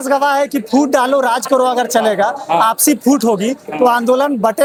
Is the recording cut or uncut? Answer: uncut